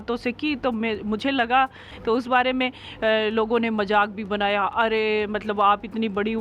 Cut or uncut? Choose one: cut